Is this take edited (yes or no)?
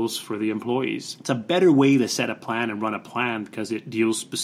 yes